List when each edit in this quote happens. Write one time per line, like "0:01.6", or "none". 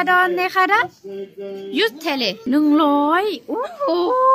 0:02.4

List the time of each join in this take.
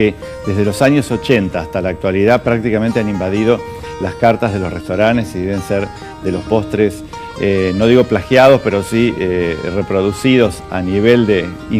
0:08.2

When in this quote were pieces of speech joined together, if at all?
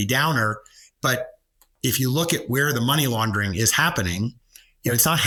none

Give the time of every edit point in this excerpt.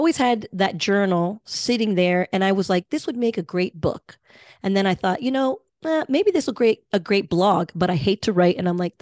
none

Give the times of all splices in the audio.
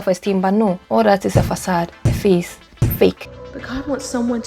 0:00.8
0:03.4

